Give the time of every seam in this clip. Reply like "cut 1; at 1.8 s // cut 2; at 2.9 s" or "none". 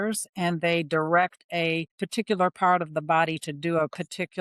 cut 1; at 2.0 s